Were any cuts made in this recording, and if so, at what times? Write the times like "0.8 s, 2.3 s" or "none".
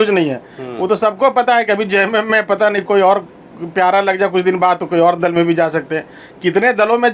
none